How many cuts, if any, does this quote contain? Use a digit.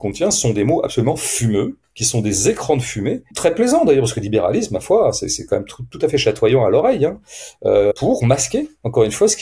2